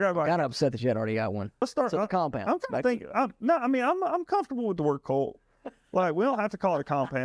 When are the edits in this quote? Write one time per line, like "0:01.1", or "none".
0:01.6